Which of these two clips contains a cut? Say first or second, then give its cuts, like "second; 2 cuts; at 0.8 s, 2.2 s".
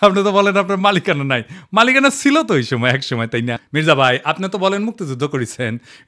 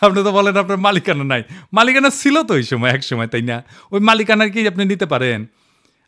first; 1 cut; at 3.6 s